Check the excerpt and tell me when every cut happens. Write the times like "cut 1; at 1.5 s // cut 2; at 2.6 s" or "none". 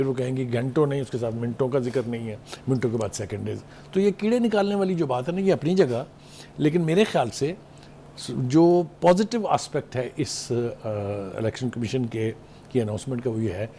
none